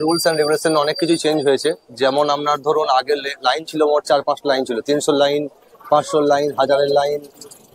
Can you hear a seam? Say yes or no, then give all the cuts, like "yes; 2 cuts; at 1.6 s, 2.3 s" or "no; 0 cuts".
no; 0 cuts